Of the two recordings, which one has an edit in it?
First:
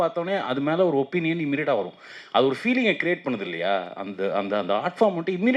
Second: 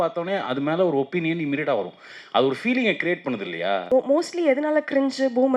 second; 1 cut; at 3.8 s

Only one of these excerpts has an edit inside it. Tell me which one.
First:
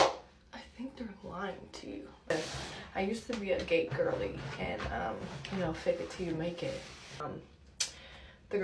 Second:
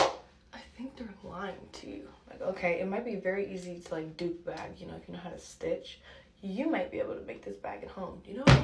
first; 2 cuts; at 2.3 s, 7.2 s

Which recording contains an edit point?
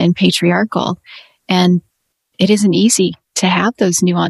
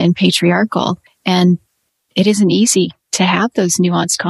second; 1 cut; at 1.1 s

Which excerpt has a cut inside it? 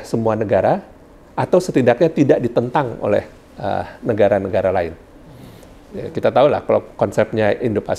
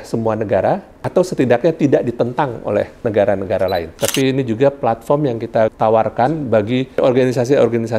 second; 5 cuts; at 0.9 s, 2.9 s, 3.9 s, 5.7 s, 6.9 s

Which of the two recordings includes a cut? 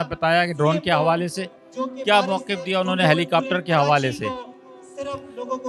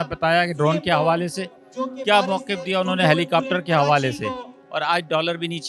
second; 1 cut; at 4.5 s

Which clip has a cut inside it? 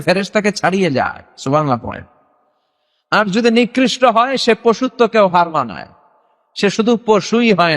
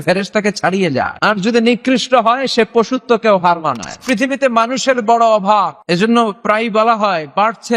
second; 3 cuts; at 1.1 s, 4.0 s, 5.8 s

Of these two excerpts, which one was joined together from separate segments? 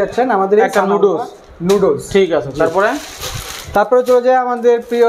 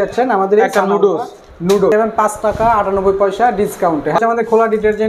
second; 2 cuts; at 1.9 s, 4.2 s

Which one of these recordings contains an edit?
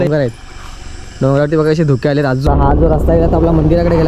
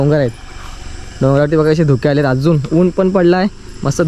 first; 1 cut; at 2.4 s

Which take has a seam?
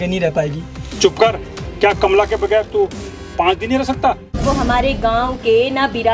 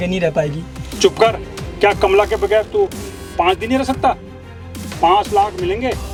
first; 1 cut; at 4.4 s

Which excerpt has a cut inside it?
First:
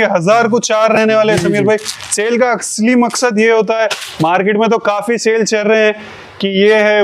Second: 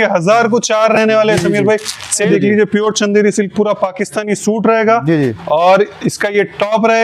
second; 1 cut; at 2.3 s

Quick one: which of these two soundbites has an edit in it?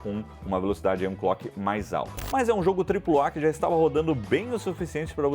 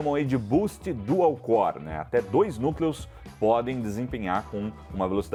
first; 1 cut; at 2.1 s

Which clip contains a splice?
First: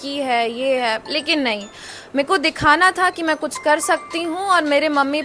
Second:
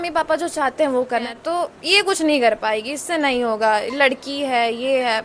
second; 1 cut; at 1.3 s

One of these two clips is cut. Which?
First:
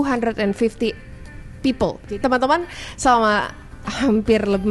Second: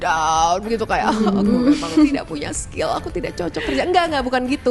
first; 1 cut; at 2.0 s

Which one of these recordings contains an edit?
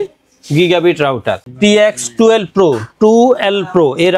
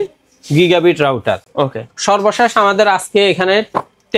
first; 1 cut; at 1.4 s

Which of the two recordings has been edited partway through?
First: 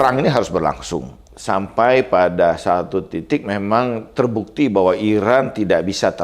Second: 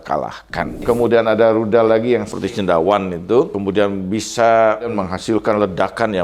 second; 3 cuts; at 0.8 s, 2.3 s, 3.6 s

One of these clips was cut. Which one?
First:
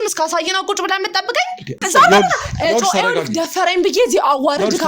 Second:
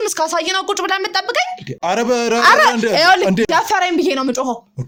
first; 1 cut; at 1.8 s

